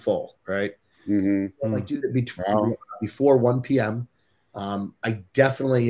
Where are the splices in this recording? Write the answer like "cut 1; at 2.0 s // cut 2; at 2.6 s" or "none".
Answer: cut 1; at 1.6 s